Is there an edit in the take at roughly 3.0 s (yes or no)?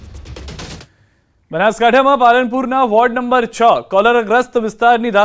yes